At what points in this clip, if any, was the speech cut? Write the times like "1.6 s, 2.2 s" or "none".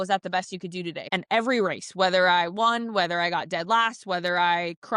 1.0 s

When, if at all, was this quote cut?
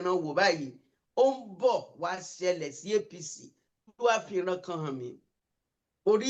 3.9 s

